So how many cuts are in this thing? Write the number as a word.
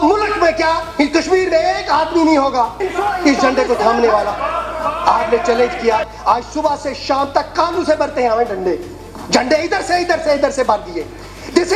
zero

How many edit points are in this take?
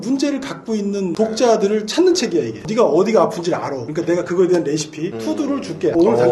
zero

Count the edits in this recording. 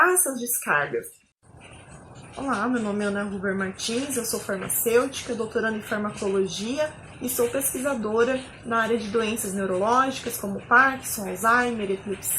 one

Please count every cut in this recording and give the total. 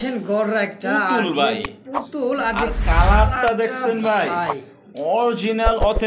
zero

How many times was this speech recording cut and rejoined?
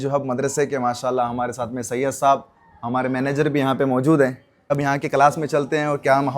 one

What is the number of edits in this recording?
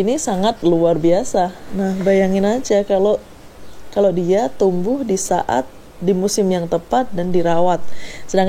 one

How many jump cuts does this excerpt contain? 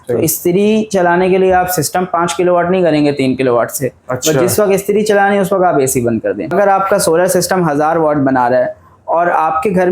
one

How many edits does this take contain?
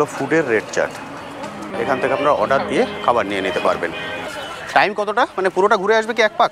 two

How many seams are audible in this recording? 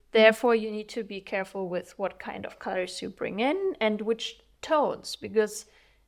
zero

